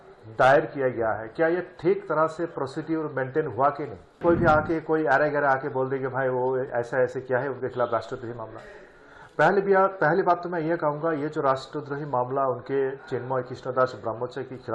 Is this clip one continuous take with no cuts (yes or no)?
no